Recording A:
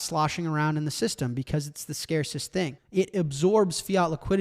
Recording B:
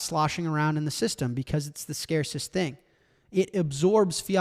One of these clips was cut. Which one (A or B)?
A